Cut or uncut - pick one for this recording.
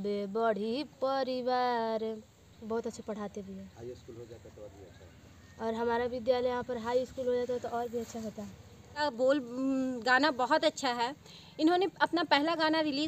cut